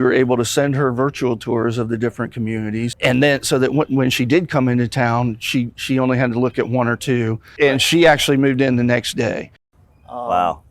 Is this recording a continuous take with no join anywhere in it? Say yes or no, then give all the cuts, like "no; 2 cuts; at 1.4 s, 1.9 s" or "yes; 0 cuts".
no; 2 cuts; at 2.9 s, 7.5 s